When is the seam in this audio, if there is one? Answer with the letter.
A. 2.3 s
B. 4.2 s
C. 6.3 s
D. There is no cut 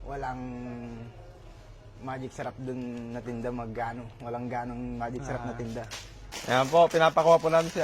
C